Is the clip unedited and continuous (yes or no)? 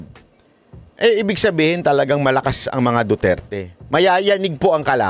yes